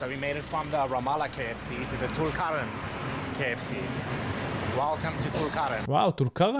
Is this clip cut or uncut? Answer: uncut